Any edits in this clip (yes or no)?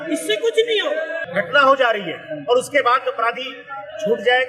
yes